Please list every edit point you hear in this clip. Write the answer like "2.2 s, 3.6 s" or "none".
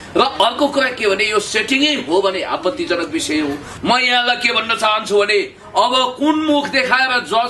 3.7 s